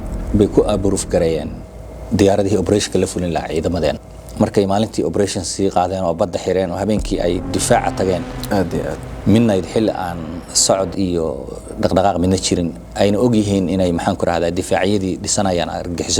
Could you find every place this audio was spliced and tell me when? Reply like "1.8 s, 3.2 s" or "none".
4.0 s